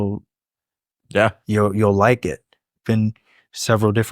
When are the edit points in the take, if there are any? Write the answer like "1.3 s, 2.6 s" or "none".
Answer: 2.8 s